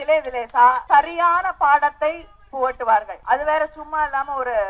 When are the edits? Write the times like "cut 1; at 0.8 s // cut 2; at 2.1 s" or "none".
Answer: cut 1; at 0.8 s // cut 2; at 3.1 s